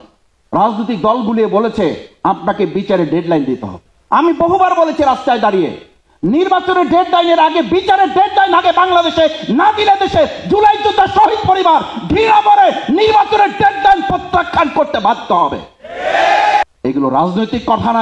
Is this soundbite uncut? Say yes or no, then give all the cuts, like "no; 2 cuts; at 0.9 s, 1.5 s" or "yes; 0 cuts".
no; 1 cut; at 16.6 s